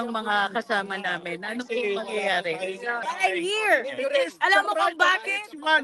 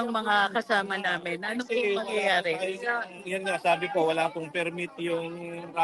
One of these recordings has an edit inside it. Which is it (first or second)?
first